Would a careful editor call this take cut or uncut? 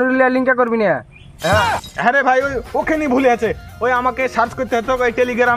cut